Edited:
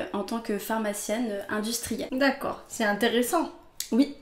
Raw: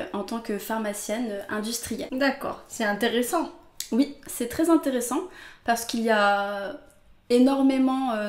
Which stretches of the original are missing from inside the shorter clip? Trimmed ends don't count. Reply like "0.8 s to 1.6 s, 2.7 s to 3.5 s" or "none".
none

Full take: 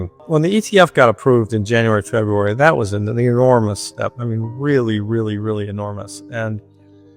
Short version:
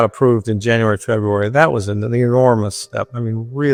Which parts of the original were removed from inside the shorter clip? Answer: none

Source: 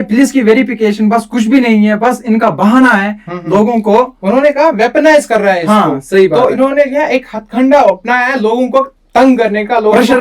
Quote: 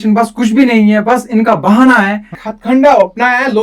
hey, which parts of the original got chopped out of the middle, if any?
3.4 s to 7.3 s

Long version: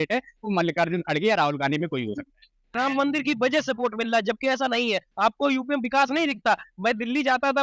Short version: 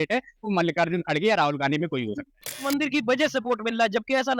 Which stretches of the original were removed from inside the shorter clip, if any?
2.6 s to 3.0 s

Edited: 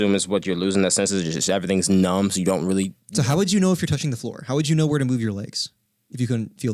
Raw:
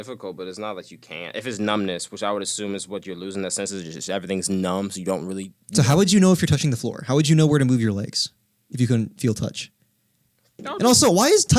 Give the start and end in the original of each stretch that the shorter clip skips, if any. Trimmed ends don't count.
none

